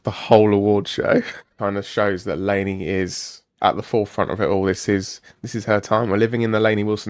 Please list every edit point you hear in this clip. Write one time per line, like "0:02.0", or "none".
0:01.5